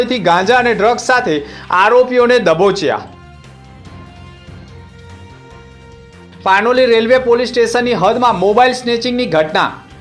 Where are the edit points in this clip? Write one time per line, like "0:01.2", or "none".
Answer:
none

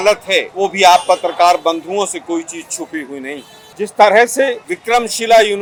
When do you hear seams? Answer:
none

